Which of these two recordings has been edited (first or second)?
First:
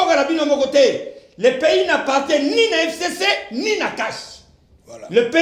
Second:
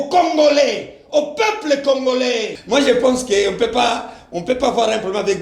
second